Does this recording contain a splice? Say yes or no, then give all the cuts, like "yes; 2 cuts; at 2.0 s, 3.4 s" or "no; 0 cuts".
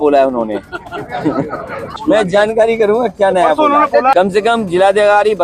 yes; 2 cuts; at 2.0 s, 4.1 s